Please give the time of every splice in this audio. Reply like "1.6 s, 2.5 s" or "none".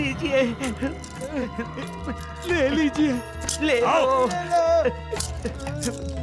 none